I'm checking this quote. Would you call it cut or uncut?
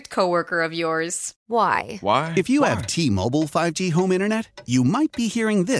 cut